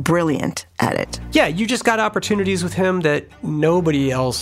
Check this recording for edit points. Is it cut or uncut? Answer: cut